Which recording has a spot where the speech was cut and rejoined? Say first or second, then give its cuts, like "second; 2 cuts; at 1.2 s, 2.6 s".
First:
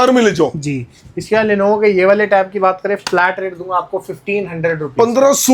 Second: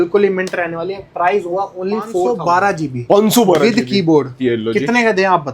second; 1 cut; at 2.3 s